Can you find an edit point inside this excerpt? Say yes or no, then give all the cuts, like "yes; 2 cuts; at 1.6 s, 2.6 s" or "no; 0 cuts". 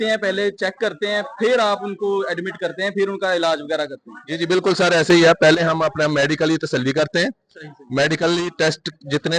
no; 0 cuts